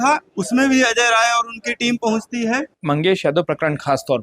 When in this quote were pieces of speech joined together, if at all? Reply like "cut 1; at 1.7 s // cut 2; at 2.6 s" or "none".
cut 1; at 2.8 s